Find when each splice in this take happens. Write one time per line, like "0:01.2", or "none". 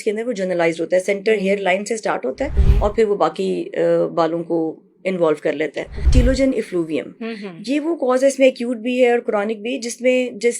0:02.6
0:06.1